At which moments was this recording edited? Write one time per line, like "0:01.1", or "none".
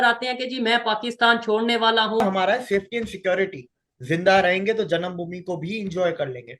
0:02.2

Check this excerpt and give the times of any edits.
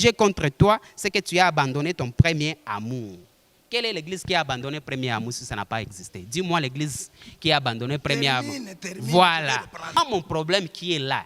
0:10.0

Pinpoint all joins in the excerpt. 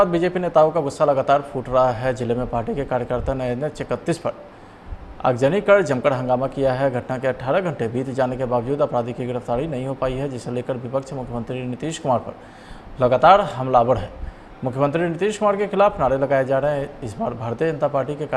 none

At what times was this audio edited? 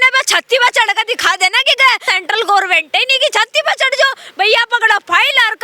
0:02.1

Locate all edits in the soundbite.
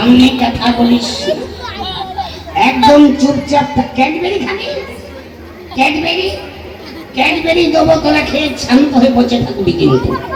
none

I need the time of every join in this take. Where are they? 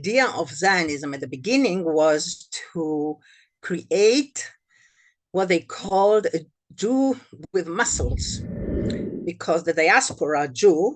none

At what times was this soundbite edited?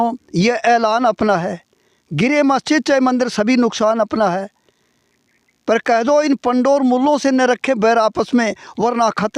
none

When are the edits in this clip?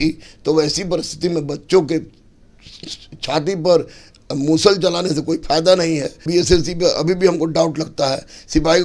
0:06.3

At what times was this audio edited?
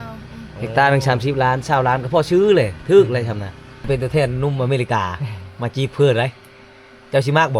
0:03.9

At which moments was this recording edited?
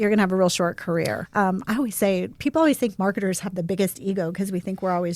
0:01.2

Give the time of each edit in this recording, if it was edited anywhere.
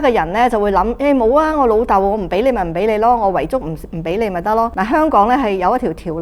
0:04.7

